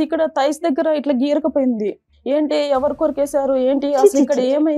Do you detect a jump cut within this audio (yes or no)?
yes